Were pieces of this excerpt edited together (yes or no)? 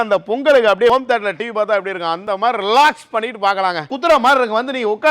yes